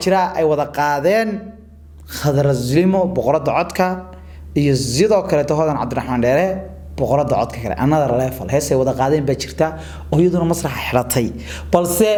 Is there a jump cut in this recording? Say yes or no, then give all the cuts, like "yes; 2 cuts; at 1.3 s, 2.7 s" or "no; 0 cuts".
no; 0 cuts